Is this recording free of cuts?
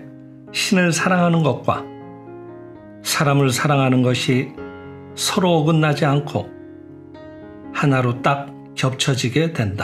yes; 0 cuts

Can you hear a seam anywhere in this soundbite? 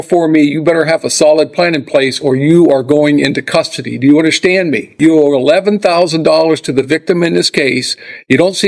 yes; 1 cut; at 4.9 s

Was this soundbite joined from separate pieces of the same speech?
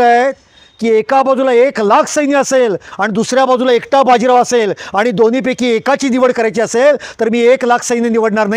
no; 0 cuts

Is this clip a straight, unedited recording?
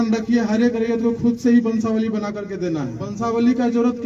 no; 1 cut; at 3.1 s

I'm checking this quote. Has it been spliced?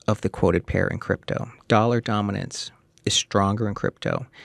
no; 0 cuts

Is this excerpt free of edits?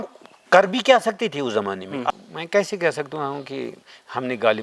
no; 1 cut; at 2.1 s

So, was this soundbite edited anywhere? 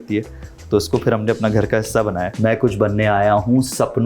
yes; 1 cut; at 2.3 s

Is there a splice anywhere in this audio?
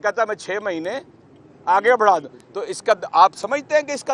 no; 0 cuts

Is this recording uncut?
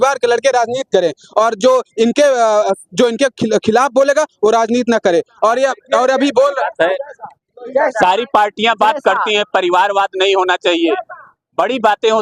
yes; 0 cuts

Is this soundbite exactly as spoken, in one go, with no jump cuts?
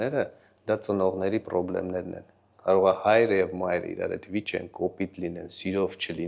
yes; 0 cuts

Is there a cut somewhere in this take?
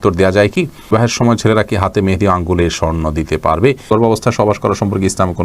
yes; 2 cuts; at 0.9 s, 3.9 s

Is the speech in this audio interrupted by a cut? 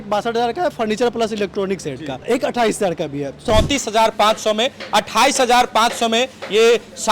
yes; 2 cuts; at 2.2 s, 3.4 s

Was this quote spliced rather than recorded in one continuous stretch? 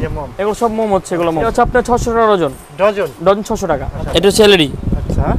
yes; 2 cuts; at 1.5 s, 4.0 s

